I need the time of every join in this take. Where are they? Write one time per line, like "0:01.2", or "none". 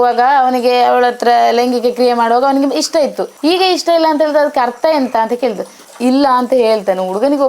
0:03.3
0:05.9